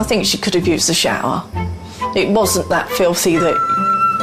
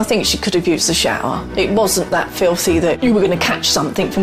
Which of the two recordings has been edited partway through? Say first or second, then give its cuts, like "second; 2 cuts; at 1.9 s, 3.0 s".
second; 2 cuts; at 1.5 s, 3.0 s